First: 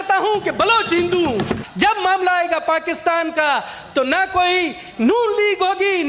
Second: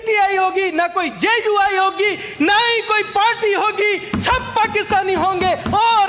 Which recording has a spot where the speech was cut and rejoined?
first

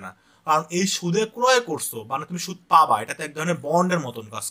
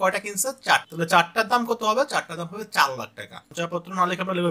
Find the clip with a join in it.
second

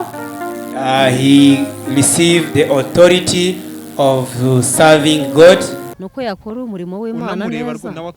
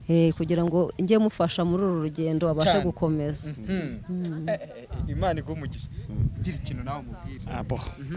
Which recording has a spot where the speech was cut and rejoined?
first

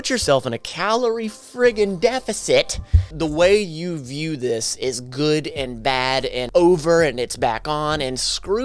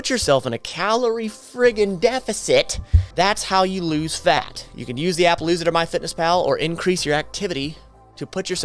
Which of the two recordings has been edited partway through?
first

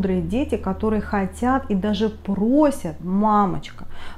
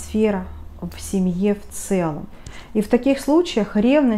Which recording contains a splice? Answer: second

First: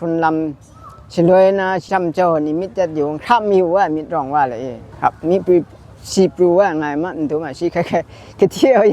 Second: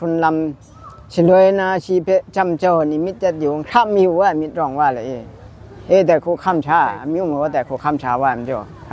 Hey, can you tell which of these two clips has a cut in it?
first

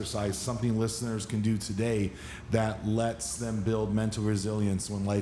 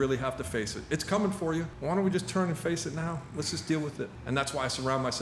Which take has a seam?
second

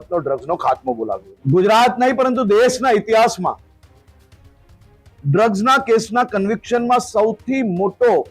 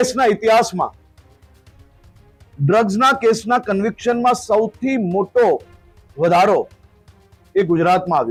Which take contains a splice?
first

